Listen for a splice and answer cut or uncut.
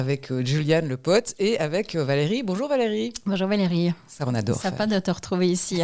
uncut